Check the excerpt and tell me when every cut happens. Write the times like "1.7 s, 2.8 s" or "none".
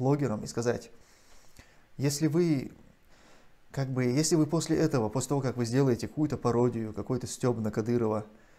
none